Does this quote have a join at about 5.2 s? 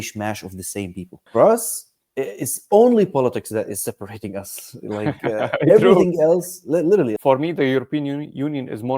no; 2 cuts; at 1.2 s, 7.2 s

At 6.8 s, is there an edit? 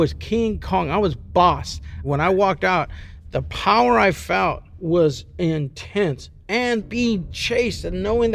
yes; 3 cuts; at 1.9 s, 4.7 s, 6.8 s

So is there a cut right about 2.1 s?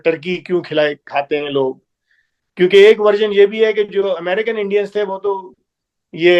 no; 0 cuts

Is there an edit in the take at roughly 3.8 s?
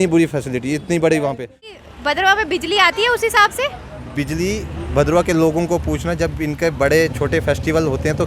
no; 1 cut; at 1.7 s

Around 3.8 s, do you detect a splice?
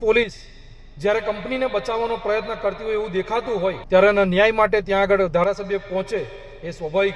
yes; 1 cut; at 3.8 s

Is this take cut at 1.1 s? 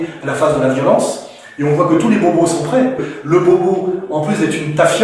no; 1 cut; at 3.1 s

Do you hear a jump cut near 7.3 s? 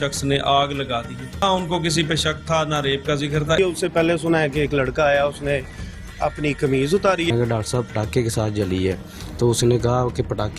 yes; 3 cuts; at 1.4 s, 3.6 s, 7.3 s

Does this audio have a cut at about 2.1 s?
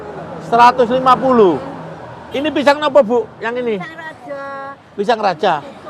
no; 0 cuts

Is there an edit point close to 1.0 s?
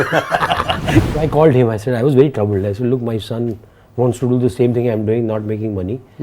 yes; 1 cut; at 1.0 s

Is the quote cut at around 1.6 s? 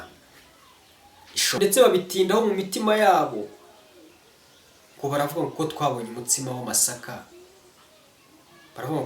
yes; 1 cut; at 1.6 s

